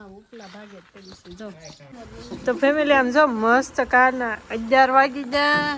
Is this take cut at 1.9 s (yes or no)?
yes